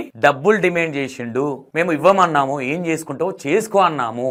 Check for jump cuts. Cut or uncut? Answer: uncut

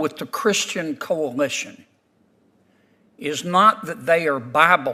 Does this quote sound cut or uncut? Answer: uncut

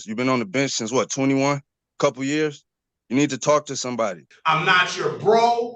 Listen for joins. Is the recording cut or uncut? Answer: cut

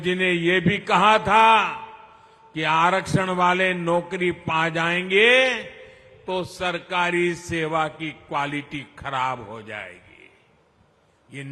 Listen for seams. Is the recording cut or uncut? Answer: uncut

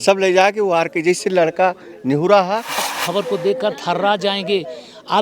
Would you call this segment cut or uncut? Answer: cut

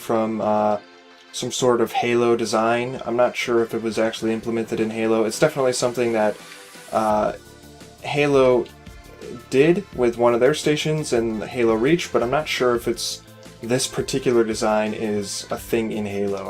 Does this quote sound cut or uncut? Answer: cut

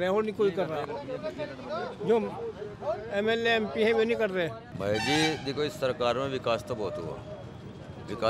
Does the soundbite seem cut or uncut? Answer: cut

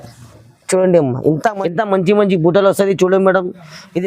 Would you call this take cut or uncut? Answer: cut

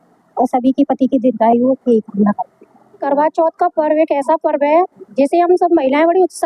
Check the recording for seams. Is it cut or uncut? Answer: cut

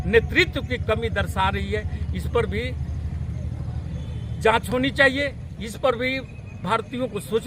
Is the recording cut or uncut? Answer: uncut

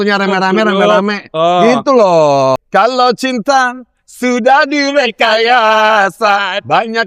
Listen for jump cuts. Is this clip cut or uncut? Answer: cut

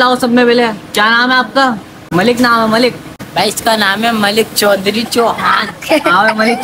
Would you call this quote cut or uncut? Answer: cut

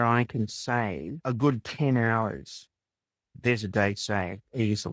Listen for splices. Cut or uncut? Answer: cut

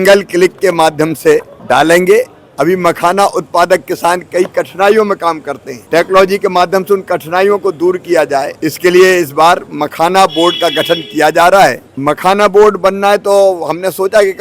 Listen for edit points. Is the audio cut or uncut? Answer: cut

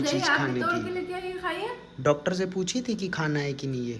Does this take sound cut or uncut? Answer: uncut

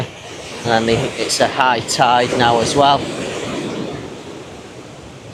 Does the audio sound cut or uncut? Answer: uncut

